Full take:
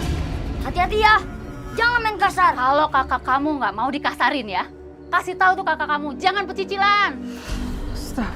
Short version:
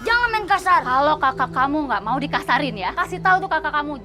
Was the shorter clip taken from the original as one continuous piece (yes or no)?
no